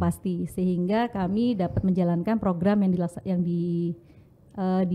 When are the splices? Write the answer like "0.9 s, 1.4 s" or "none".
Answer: none